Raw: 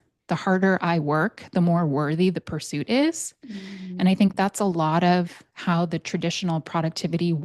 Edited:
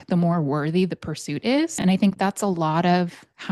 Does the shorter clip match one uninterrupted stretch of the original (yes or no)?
no